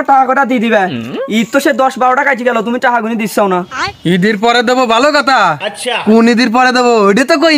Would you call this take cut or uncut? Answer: uncut